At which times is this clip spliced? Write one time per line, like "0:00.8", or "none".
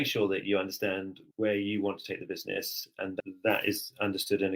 0:01.2
0:03.2